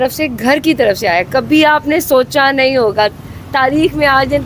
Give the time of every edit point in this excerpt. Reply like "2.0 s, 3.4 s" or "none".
none